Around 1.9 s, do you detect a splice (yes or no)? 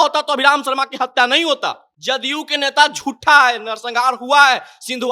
yes